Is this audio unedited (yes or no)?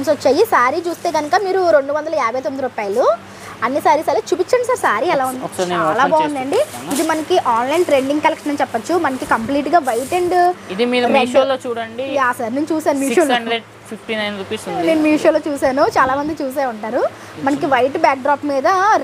yes